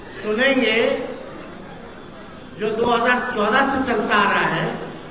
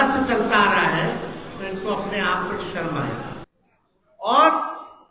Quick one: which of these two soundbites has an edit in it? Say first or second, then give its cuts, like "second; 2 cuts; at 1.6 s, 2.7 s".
second; 1 cut; at 3.5 s